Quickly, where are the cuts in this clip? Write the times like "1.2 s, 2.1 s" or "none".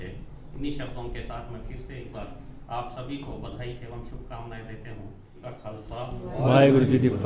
5.4 s